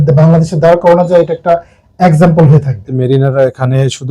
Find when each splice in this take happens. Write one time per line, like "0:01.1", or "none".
0:02.9